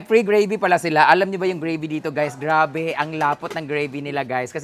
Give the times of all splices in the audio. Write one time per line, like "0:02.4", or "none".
none